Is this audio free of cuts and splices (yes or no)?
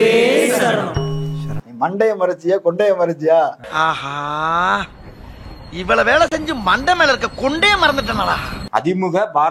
no